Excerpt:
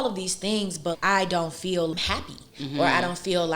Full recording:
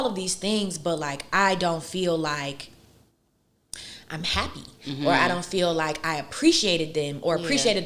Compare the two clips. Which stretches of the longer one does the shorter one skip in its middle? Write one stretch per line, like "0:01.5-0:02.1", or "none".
0:01.0-0:01.3
0:02.2-0:04.2